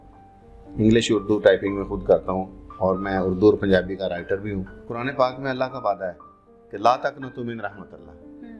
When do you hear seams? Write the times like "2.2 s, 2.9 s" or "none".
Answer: 5.1 s